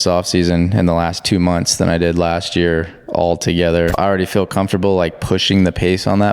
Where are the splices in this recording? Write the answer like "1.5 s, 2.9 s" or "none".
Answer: 3.9 s